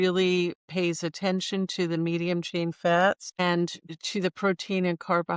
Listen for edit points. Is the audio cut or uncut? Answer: cut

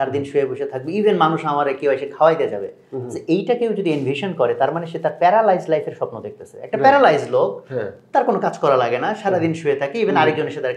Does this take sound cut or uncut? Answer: uncut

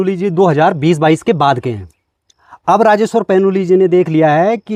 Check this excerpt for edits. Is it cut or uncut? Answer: uncut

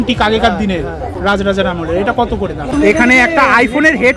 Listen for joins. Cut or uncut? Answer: cut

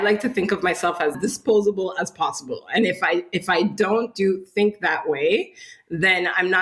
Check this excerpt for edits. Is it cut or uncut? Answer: cut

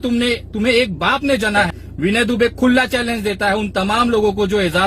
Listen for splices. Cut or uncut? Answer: cut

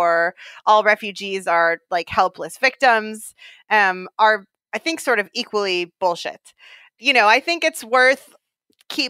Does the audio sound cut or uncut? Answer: uncut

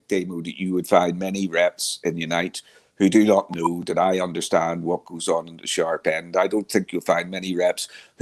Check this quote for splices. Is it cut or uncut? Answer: uncut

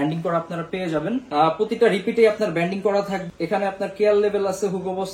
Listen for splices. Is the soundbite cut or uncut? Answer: uncut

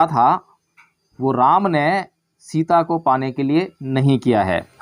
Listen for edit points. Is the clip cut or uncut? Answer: uncut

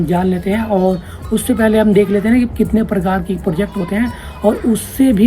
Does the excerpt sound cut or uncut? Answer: uncut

